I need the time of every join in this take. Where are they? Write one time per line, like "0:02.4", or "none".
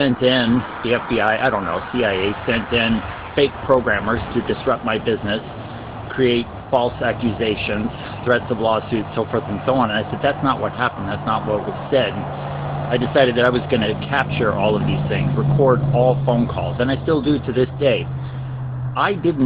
none

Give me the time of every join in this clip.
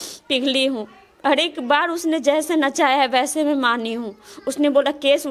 none

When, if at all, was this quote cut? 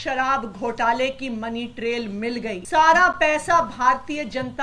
0:02.6

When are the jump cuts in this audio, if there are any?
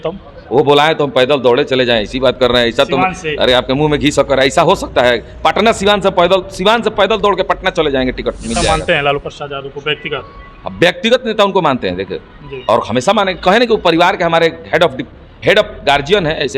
0:08.6

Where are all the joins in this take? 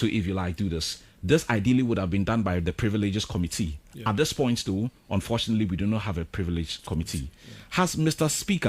0:06.8

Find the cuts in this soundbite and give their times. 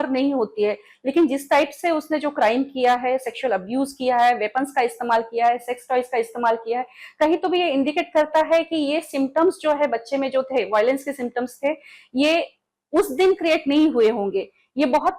none

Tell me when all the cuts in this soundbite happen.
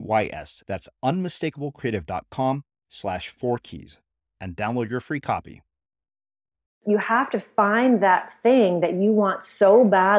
0:06.8

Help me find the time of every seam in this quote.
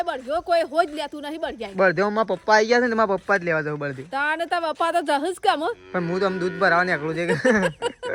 none

